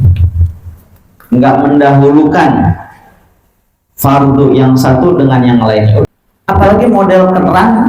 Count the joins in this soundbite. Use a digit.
1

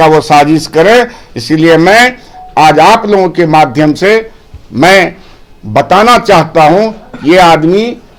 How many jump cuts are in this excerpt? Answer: 0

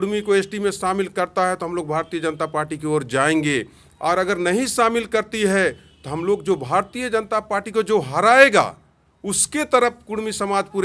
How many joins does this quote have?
0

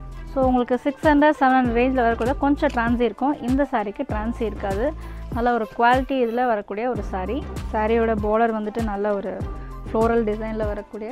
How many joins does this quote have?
1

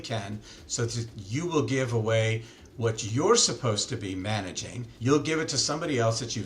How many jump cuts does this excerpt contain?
1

